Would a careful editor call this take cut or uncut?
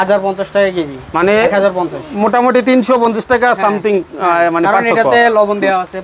uncut